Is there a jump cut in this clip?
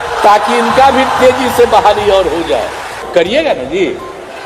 yes; 1 cut; at 3.0 s

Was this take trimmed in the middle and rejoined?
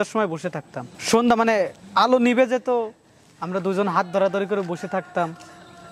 no; 0 cuts

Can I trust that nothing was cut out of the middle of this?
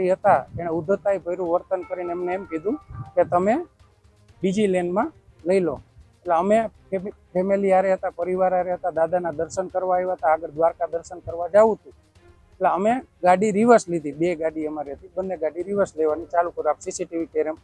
yes; 0 cuts

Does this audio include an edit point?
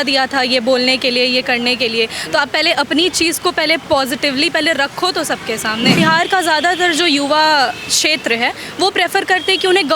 yes; 1 cut; at 6.0 s

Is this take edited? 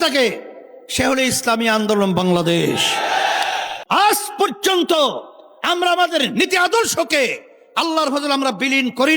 yes; 1 cut; at 3.7 s

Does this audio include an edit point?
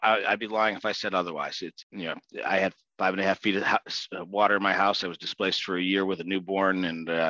yes; 1 cut; at 1.7 s

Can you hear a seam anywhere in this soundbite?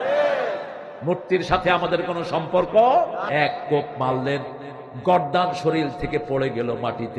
yes; 1 cut; at 3.2 s

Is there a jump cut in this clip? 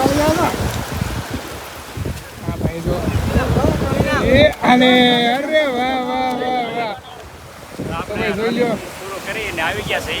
no; 0 cuts

